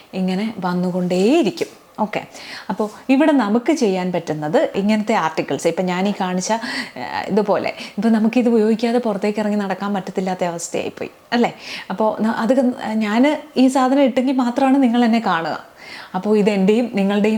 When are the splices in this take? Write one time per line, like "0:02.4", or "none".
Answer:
none